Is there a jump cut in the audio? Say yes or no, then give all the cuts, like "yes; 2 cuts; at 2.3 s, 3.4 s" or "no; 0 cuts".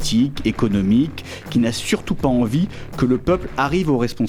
no; 0 cuts